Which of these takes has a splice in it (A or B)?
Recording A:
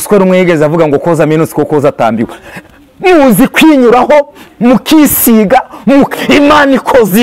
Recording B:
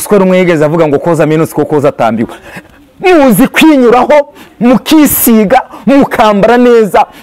A